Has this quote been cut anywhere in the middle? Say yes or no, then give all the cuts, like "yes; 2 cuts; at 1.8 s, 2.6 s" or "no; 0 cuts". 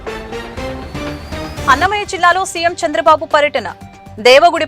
yes; 1 cut; at 1.4 s